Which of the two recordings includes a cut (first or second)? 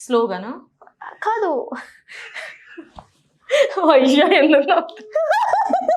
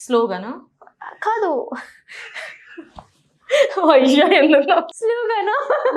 second